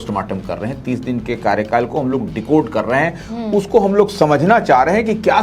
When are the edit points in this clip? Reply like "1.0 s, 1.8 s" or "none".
none

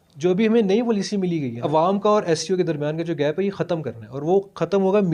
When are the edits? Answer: 1.7 s

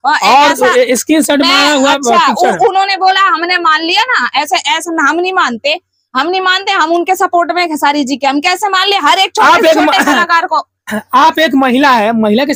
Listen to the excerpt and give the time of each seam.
none

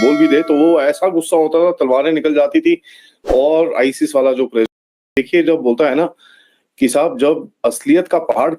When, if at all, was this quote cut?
5.1 s

